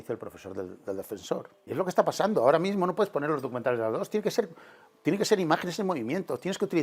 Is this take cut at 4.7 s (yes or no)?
no